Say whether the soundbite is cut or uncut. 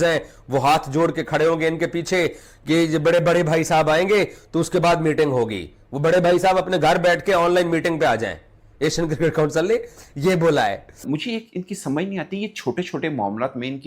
cut